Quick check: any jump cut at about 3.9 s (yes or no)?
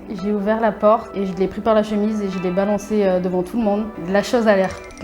yes